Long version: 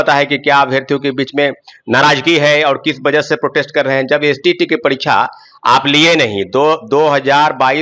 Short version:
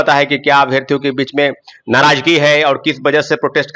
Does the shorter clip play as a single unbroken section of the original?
yes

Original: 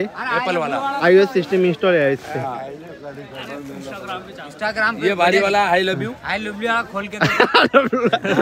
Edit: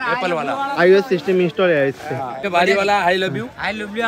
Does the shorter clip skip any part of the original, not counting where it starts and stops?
yes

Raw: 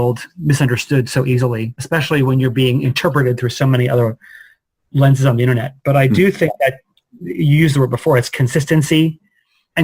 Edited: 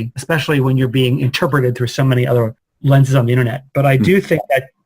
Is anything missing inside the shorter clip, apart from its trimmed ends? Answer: yes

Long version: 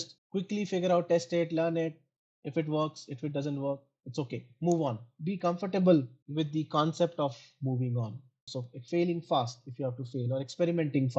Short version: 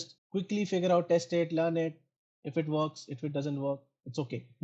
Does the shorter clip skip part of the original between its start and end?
no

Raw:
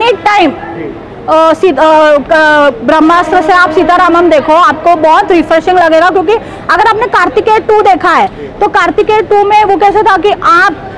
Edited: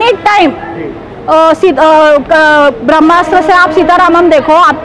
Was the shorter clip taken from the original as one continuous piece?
yes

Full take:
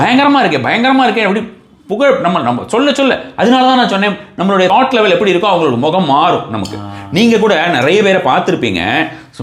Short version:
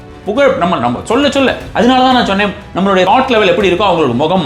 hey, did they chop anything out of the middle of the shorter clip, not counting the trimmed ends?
no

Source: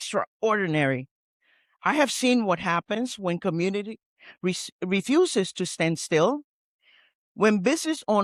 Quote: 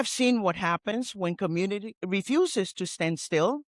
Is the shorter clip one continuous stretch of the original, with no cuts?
no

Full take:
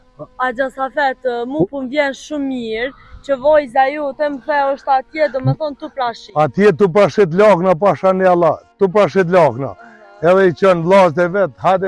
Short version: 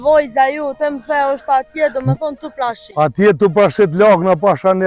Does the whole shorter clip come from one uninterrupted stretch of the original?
yes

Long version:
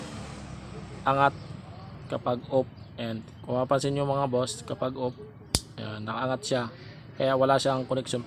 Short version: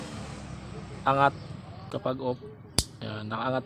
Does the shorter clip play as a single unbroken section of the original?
no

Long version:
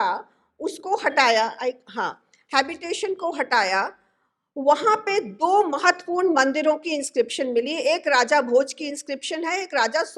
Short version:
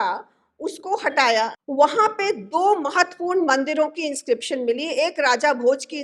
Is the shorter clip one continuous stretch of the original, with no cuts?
no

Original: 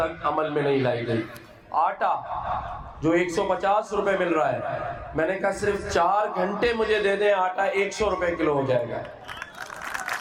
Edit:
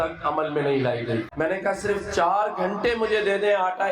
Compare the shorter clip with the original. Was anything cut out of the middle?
yes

